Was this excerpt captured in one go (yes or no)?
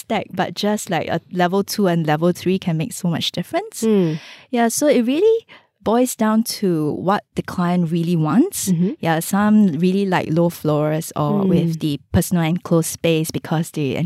yes